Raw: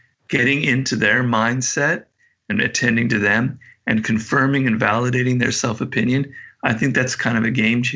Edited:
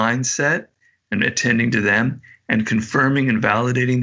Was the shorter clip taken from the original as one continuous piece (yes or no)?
yes